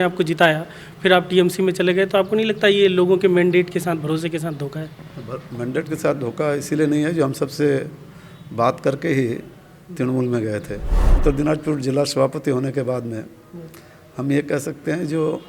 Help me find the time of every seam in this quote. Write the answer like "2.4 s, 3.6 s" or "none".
11.2 s